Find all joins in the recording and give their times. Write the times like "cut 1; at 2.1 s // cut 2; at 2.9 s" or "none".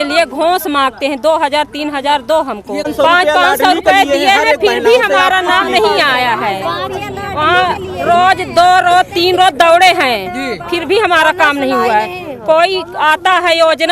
cut 1; at 2.9 s

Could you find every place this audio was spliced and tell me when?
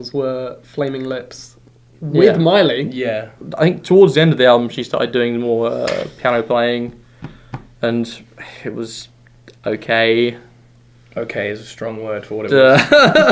cut 1; at 2.3 s

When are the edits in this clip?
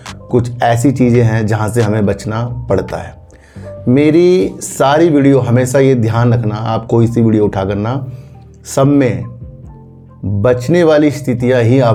none

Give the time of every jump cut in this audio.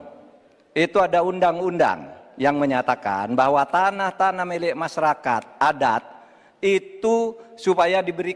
none

